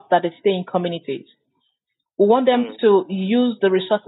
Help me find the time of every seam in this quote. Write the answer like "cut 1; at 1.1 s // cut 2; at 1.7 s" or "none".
none